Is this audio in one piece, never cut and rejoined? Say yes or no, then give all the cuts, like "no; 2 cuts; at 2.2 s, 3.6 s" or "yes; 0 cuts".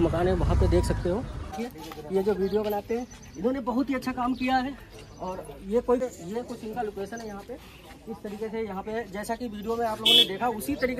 no; 2 cuts; at 1.6 s, 6.0 s